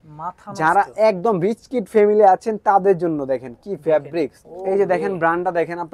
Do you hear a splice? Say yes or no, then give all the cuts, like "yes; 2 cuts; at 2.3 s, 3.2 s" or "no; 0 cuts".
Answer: yes; 1 cut; at 4.5 s